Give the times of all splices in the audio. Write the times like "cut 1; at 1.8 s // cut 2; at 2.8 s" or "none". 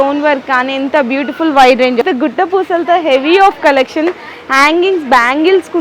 cut 1; at 2.0 s